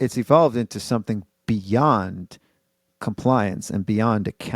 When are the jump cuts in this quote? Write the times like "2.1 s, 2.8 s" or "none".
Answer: none